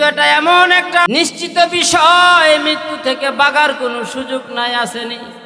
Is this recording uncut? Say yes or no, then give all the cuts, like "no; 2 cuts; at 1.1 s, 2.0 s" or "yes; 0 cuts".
no; 1 cut; at 1.1 s